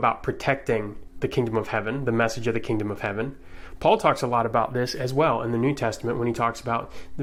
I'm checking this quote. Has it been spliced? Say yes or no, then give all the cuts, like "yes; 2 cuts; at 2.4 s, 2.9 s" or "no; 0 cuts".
no; 0 cuts